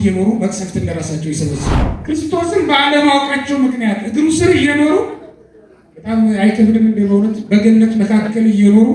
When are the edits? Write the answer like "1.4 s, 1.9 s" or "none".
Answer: 1.8 s